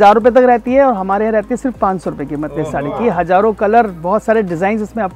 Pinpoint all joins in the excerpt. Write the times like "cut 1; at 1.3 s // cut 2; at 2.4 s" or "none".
none